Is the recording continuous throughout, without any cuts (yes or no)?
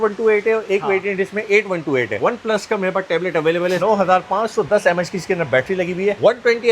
no